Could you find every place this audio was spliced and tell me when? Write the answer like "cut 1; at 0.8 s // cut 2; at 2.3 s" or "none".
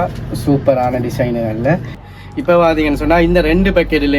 cut 1; at 2.0 s

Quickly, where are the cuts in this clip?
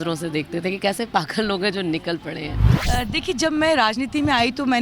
cut 1; at 2.7 s

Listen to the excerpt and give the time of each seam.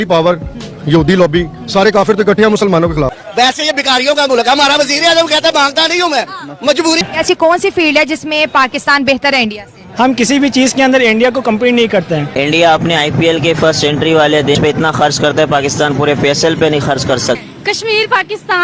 cut 1; at 3.1 s // cut 2; at 7.0 s // cut 3; at 12.3 s // cut 4; at 14.6 s // cut 5; at 17.4 s

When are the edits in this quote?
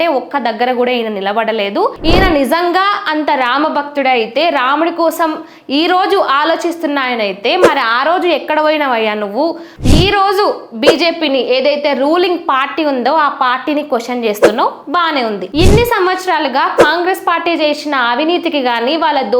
cut 1; at 2.0 s // cut 2; at 9.7 s // cut 3; at 15.4 s

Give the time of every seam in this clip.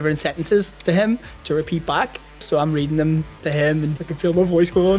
cut 1; at 2.5 s // cut 2; at 3.9 s

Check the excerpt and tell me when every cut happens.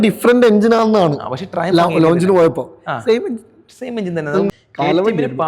cut 1; at 4.5 s

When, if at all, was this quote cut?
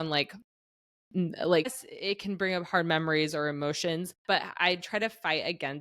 cut 1; at 1.9 s // cut 2; at 4.1 s

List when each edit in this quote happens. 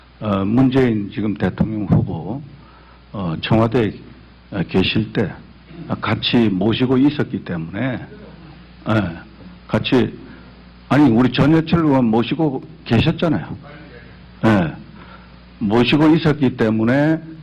cut 1; at 2.5 s

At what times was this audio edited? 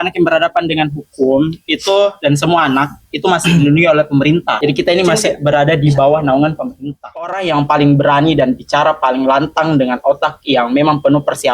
cut 1; at 7.2 s

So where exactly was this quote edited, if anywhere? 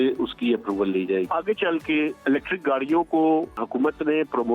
cut 1; at 1.3 s // cut 2; at 3.6 s

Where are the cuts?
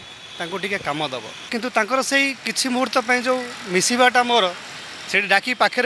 cut 1; at 1.4 s

